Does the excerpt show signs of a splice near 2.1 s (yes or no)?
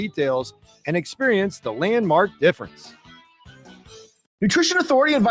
no